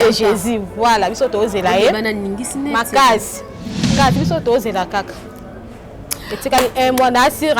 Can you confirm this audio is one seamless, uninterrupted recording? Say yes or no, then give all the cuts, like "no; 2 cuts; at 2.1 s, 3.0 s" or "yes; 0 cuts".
no; 1 cut; at 3.9 s